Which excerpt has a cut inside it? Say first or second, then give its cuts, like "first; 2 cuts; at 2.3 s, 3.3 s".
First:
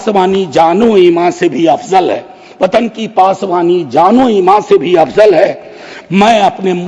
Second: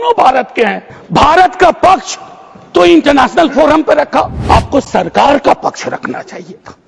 second; 2 cuts; at 0.9 s, 4.4 s